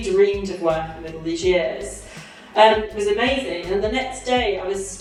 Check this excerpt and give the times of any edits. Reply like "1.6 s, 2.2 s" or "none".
none